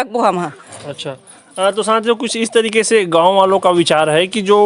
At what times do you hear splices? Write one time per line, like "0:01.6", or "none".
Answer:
none